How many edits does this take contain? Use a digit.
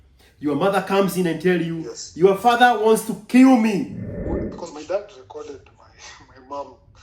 1